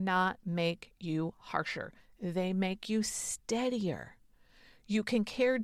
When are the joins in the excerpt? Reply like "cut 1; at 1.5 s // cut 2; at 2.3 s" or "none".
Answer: none

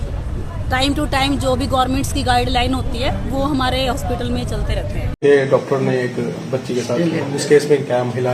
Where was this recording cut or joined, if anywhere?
cut 1; at 5.0 s

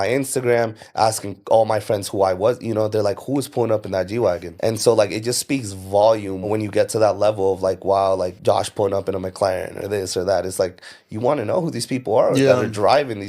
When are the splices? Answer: cut 1; at 4.5 s // cut 2; at 6.5 s // cut 3; at 8.4 s

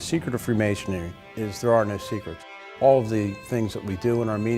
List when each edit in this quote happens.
cut 1; at 1.2 s // cut 2; at 2.5 s

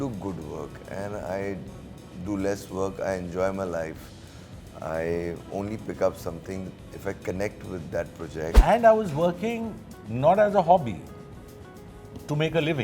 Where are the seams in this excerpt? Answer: cut 1; at 8.6 s

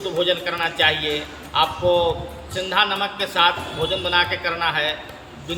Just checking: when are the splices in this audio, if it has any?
none

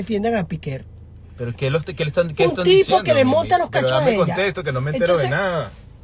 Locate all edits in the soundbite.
none

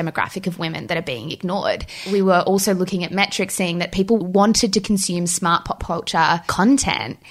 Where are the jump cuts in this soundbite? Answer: cut 1; at 2.0 s // cut 2; at 4.2 s

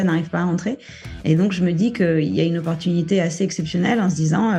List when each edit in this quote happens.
none

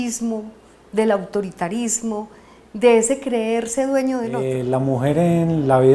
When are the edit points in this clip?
cut 1; at 4.4 s

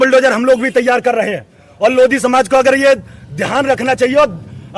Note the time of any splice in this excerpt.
none

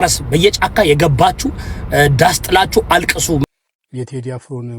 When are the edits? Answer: cut 1; at 3.4 s

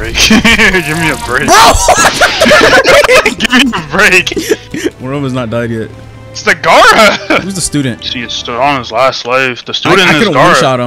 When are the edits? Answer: cut 1; at 5.0 s // cut 2; at 7.6 s

